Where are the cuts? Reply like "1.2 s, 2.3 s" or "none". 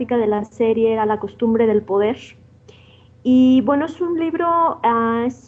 2.5 s